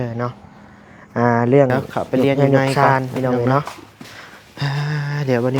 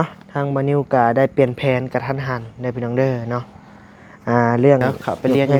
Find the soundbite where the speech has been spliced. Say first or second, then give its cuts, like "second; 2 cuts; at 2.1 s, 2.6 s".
first; 1 cut; at 3.8 s